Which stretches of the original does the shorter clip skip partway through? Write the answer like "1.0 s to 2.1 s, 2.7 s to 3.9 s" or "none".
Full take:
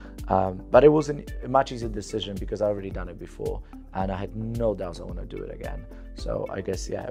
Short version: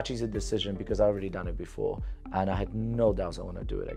none